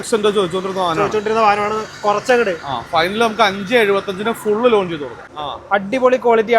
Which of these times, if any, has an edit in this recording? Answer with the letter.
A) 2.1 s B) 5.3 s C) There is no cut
B